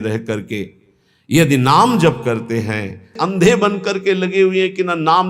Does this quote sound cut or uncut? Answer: cut